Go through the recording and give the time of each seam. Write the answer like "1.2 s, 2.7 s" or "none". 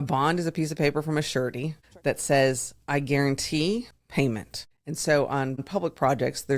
1.8 s, 4.1 s, 5.7 s

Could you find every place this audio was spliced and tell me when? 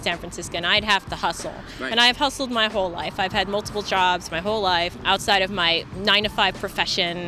5.0 s

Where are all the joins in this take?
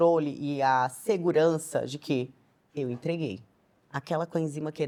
none

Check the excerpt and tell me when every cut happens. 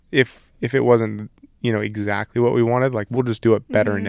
none

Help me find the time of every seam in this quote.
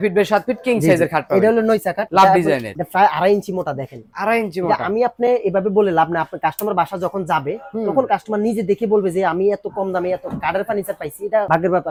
none

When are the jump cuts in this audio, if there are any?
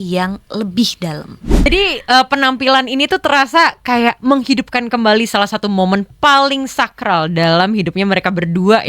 1.6 s

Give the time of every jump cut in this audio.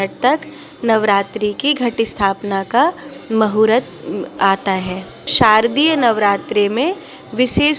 5.3 s

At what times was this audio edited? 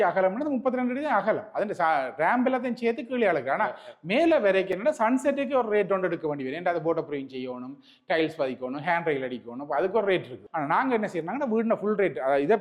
10.4 s

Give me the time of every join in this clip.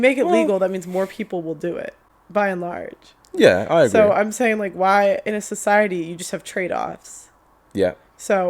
none

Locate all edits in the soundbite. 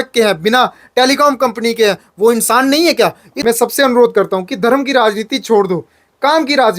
3.3 s

